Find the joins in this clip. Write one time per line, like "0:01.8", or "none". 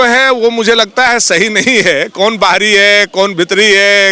none